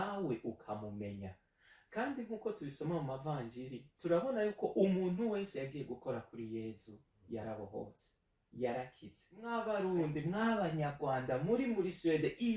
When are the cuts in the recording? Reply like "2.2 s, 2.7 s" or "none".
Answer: 9.3 s